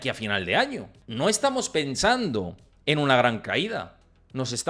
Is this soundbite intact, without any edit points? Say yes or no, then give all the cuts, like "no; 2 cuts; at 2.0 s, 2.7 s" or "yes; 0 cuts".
no; 1 cut; at 1.0 s